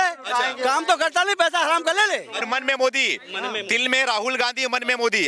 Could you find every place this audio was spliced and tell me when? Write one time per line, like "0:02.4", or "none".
0:02.4